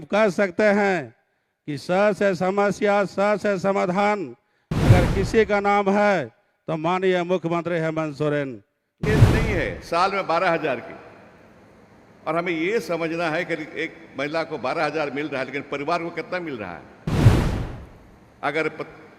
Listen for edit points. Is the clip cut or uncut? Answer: cut